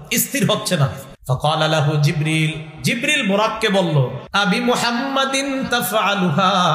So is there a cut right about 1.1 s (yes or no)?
yes